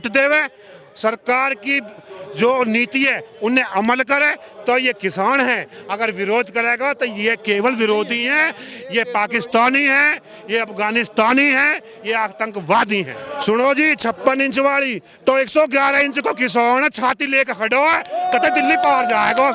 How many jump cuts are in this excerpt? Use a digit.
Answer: 1